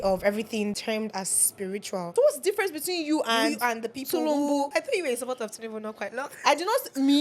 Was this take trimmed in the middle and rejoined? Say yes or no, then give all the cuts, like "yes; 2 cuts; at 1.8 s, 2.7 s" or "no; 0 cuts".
yes; 3 cuts; at 0.8 s, 2.1 s, 4.7 s